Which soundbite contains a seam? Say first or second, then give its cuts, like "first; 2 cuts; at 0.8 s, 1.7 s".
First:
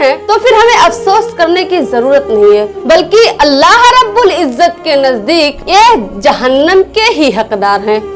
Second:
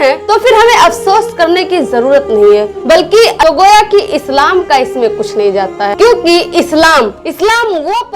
second; 2 cuts; at 3.4 s, 5.9 s